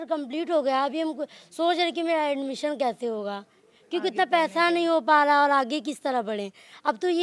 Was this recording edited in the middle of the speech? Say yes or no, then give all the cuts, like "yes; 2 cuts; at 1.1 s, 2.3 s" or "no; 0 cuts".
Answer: no; 0 cuts